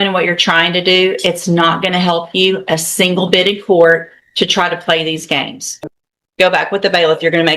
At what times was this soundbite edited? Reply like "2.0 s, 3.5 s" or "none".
5.6 s